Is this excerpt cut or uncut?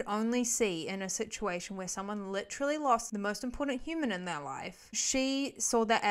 cut